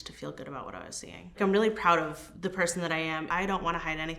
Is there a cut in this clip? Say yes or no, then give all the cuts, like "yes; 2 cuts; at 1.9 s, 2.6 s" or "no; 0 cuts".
yes; 2 cuts; at 1.3 s, 3.3 s